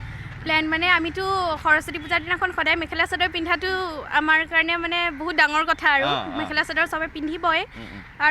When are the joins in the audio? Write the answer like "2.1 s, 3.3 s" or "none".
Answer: none